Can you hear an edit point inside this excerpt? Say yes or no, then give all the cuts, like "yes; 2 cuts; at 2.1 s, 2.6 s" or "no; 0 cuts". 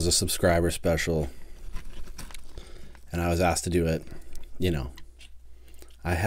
no; 0 cuts